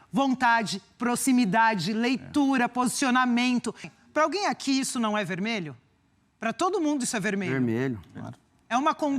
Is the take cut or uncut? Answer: cut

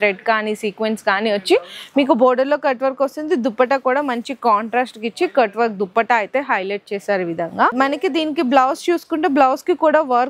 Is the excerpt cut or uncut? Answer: uncut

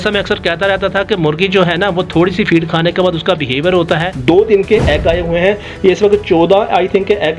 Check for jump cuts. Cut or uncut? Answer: cut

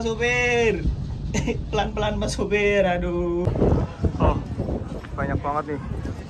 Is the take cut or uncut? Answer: cut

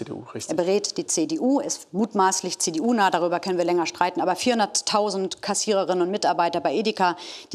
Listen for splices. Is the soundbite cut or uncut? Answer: uncut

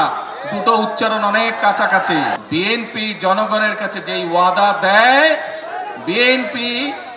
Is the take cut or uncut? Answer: cut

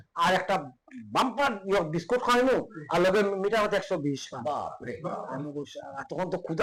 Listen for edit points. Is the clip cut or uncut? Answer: uncut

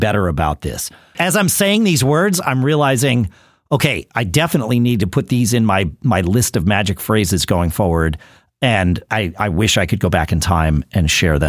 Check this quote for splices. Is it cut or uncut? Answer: cut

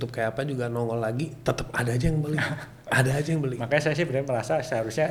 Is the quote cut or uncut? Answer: uncut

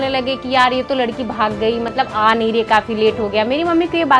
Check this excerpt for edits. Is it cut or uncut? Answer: uncut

